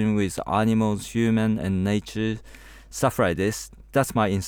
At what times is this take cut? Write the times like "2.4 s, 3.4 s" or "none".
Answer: none